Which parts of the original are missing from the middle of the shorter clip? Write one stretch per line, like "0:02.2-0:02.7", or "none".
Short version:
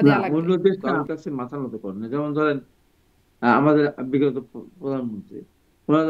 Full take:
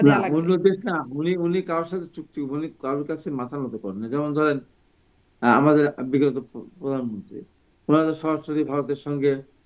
0:00.9-0:02.9